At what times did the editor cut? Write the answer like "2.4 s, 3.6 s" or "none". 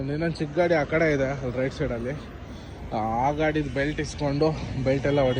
none